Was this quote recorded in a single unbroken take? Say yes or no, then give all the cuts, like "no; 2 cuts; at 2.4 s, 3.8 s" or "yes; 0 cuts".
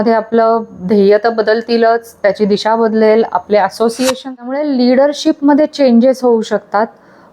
no; 1 cut; at 4.2 s